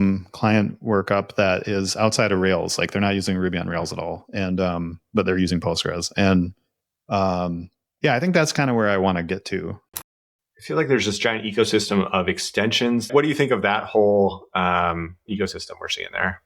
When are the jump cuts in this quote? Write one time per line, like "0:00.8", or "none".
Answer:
0:09.8
0:13.1